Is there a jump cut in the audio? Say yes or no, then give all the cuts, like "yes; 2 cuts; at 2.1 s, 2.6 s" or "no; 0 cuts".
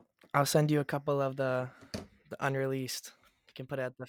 no; 0 cuts